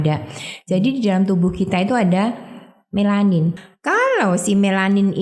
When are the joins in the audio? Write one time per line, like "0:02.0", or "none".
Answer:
0:03.6

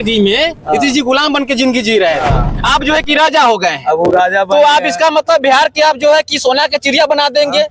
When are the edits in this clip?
none

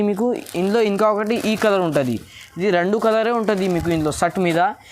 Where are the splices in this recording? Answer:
none

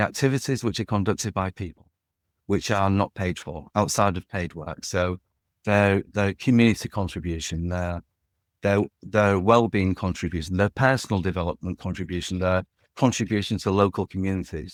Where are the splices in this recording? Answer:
none

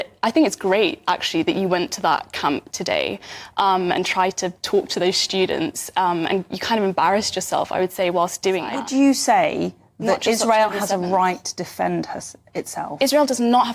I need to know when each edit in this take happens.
0:08.7

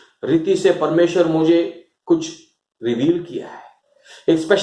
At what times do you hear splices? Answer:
none

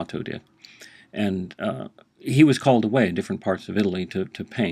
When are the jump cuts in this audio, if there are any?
0:02.0

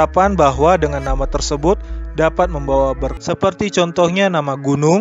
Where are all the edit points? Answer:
0:03.2

